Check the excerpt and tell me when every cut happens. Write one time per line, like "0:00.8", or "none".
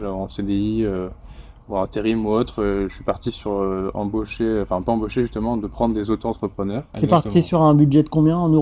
0:06.9